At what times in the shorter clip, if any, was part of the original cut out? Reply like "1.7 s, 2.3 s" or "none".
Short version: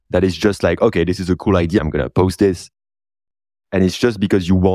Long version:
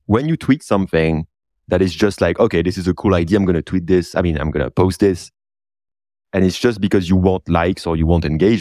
1.8 s